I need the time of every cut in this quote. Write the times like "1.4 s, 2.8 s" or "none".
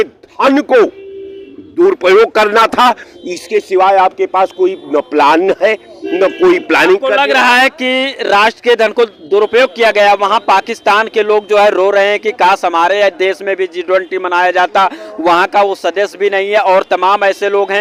none